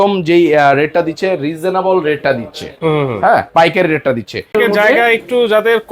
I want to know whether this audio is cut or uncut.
cut